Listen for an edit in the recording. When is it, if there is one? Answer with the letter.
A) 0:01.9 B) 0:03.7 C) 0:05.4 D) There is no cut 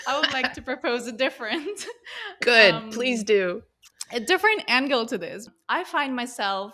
C